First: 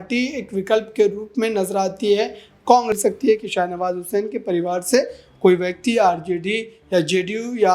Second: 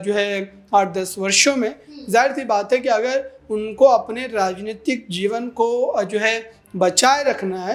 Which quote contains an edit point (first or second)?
first